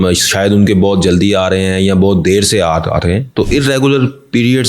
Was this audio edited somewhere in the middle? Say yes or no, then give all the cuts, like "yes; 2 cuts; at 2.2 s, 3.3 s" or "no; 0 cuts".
no; 0 cuts